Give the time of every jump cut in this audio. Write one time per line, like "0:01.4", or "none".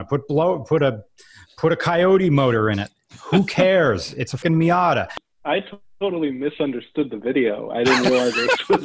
0:04.3
0:05.2